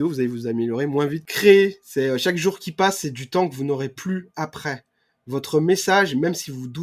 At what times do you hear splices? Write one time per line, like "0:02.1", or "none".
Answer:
0:01.2

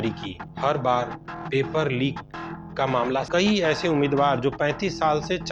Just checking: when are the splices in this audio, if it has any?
0:03.3

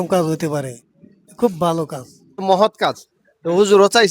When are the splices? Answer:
0:02.4

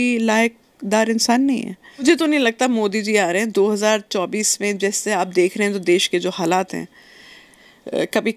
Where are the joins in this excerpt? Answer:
0:02.0

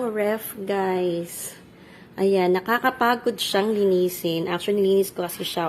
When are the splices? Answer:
none

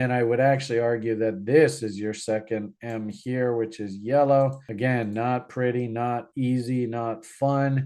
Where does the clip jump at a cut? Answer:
none

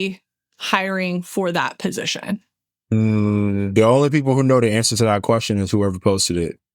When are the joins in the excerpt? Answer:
0:02.9

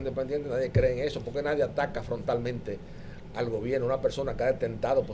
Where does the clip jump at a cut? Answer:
none

